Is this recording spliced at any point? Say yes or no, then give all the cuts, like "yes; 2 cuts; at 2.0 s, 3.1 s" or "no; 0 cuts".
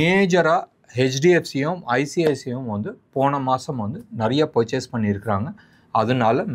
no; 0 cuts